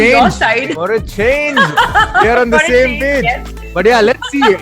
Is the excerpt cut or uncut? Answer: uncut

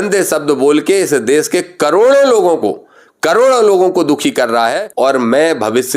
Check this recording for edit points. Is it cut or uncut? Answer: cut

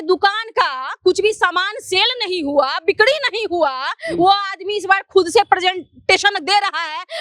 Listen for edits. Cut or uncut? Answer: uncut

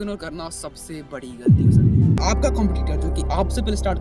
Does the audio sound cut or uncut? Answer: cut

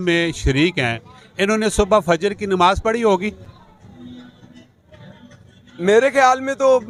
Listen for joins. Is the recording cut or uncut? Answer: uncut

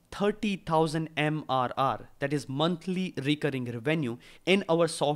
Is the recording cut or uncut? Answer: uncut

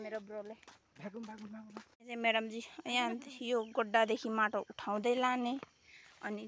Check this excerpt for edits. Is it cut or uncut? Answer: cut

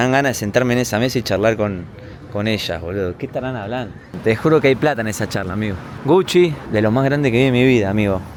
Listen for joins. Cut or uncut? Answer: uncut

